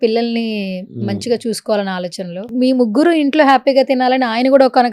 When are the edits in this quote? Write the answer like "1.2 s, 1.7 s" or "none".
2.5 s